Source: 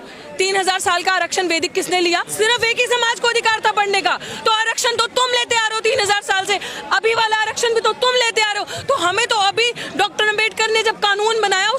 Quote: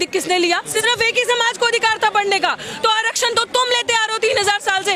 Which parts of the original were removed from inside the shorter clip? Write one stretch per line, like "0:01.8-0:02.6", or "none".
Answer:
none